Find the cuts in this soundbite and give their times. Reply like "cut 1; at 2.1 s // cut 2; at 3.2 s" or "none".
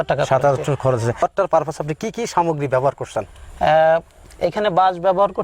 cut 1; at 1.2 s